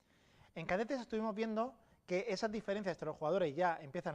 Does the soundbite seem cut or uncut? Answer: cut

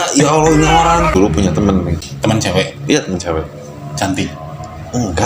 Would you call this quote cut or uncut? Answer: cut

